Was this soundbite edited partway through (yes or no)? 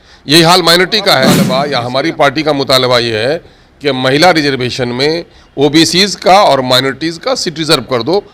yes